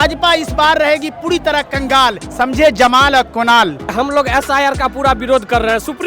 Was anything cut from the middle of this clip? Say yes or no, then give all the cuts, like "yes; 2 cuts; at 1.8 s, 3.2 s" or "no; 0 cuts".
yes; 2 cuts; at 2.2 s, 3.9 s